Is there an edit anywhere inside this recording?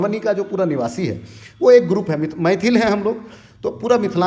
no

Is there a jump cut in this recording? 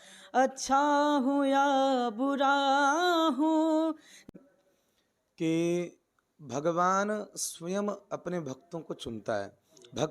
yes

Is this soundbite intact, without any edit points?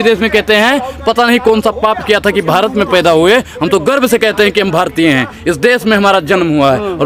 yes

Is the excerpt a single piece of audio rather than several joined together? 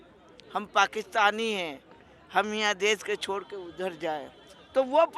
yes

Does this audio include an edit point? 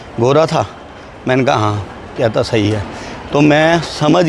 no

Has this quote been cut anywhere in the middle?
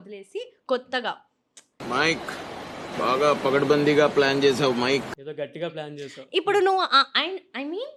no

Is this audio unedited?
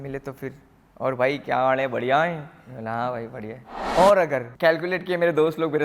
no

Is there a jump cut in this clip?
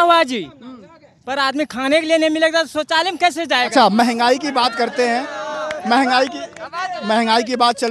no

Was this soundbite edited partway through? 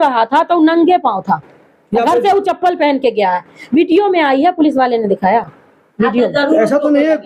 no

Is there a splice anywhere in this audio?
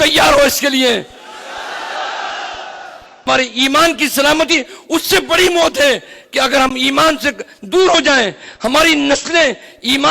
yes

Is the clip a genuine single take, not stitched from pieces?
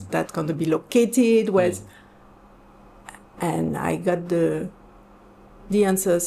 yes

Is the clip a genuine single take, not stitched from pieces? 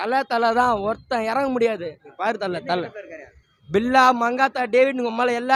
yes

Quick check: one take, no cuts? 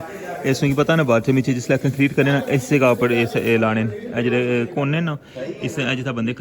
yes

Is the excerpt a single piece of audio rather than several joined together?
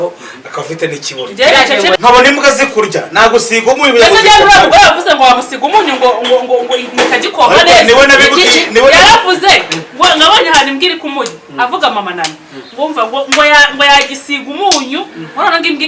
no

